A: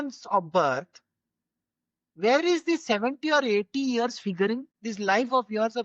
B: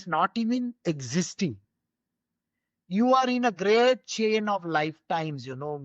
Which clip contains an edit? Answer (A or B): A